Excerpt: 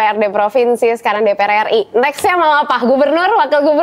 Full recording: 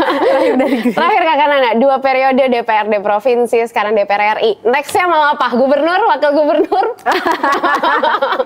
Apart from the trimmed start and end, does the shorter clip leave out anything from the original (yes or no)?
no